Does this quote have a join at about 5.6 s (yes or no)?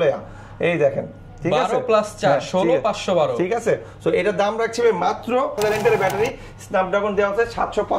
yes